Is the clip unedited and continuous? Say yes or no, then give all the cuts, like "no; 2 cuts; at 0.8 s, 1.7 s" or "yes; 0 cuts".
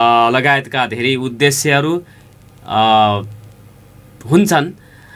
yes; 0 cuts